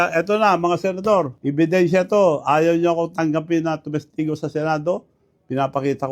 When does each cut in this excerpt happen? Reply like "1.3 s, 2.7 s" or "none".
1.4 s